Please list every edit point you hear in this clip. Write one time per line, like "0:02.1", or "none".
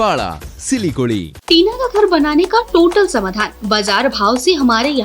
0:01.3